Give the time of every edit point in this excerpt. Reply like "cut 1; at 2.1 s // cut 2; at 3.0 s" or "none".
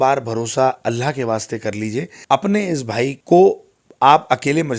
cut 1; at 2.1 s // cut 2; at 3.2 s